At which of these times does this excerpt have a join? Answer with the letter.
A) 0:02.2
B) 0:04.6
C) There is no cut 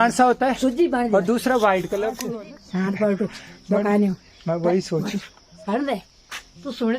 A